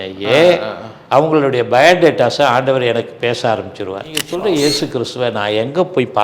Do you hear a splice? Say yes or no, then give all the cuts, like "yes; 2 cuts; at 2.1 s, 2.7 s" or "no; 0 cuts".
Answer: yes; 1 cut; at 4.2 s